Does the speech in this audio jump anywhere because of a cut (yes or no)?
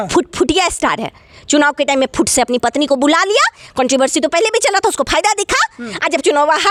no